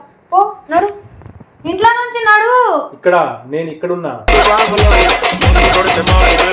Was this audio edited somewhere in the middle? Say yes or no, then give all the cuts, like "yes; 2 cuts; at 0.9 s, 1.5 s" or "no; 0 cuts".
yes; 1 cut; at 4.3 s